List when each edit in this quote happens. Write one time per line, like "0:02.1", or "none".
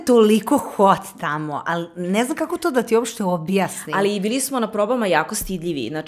none